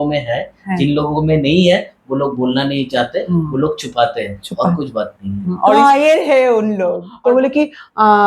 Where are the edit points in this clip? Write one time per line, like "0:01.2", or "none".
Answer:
0:07.1